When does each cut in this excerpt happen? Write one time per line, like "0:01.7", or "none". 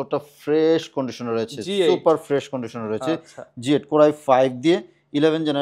none